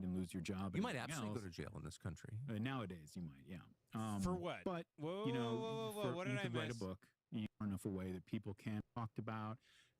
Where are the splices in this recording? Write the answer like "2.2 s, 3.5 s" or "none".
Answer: 7.6 s, 8.8 s